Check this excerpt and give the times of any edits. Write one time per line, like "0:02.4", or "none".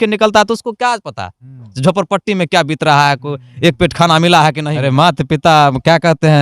0:04.6